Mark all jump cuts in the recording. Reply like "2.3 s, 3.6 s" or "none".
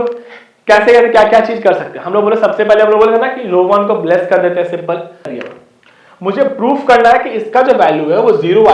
5.3 s